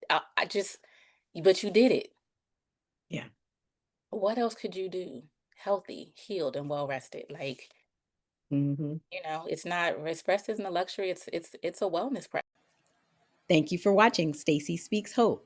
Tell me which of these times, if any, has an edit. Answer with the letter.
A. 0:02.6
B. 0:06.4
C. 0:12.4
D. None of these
C